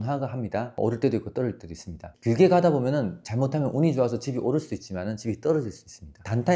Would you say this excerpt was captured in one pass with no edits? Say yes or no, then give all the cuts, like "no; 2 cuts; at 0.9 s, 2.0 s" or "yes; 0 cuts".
yes; 0 cuts